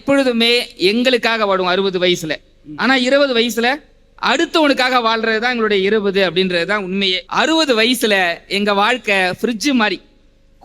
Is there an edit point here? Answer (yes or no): yes